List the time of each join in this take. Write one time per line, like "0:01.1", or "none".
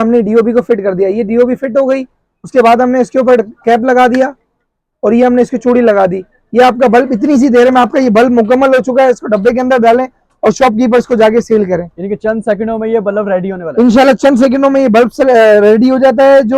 none

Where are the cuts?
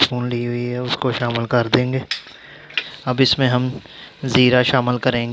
0:02.8

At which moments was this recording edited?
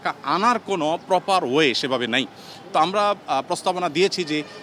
none

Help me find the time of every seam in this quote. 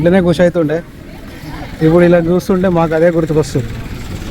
none

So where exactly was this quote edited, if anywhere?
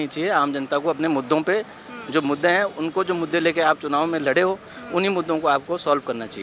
none

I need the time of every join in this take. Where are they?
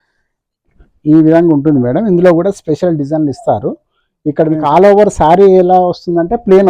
0:04.6

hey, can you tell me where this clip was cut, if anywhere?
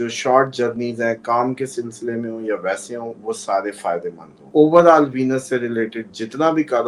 0:04.5

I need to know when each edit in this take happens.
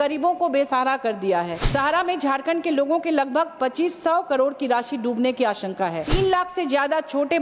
0:01.6
0:06.1

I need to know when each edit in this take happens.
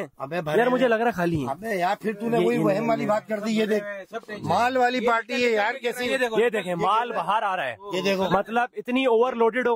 none

